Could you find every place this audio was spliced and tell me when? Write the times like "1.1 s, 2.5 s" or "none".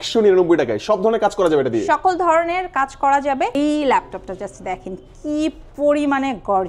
3.6 s